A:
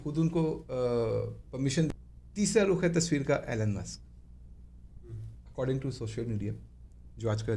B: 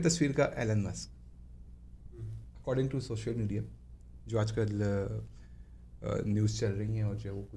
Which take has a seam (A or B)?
A